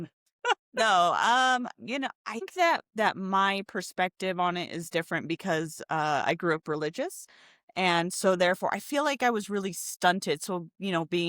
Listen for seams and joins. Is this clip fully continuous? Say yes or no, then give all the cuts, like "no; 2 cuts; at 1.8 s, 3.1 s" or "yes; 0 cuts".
no; 1 cut; at 2.5 s